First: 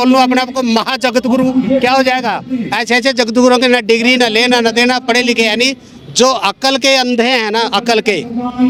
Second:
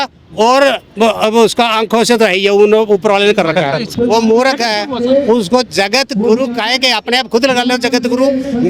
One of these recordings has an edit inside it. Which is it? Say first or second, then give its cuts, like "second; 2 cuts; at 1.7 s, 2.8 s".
second; 1 cut; at 3.9 s